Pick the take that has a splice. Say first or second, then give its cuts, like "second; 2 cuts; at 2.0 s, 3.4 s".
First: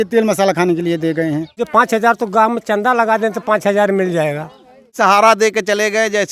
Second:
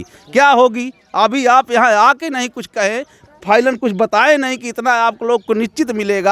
first; 2 cuts; at 1.6 s, 4.9 s